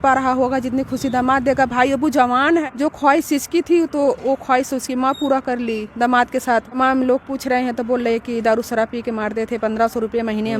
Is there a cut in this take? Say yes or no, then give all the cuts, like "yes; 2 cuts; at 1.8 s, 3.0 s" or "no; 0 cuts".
yes; 2 cuts; at 2.6 s, 6.8 s